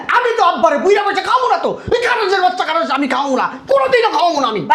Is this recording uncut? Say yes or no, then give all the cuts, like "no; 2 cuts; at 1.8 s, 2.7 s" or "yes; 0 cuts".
yes; 0 cuts